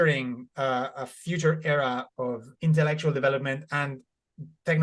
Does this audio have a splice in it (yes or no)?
no